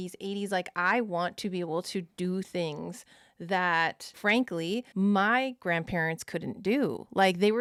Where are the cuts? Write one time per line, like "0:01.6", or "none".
none